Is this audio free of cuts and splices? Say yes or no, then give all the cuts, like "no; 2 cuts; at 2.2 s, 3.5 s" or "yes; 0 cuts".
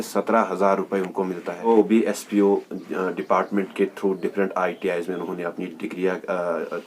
no; 1 cut; at 1.7 s